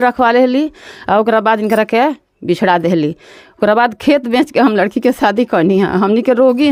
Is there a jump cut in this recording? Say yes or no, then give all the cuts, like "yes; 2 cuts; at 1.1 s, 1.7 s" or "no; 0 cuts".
no; 0 cuts